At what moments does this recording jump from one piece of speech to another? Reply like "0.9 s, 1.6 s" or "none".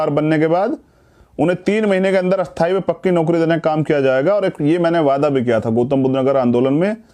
none